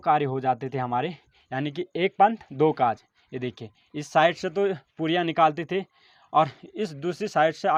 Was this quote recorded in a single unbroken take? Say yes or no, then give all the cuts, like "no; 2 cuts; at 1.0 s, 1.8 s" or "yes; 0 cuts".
yes; 0 cuts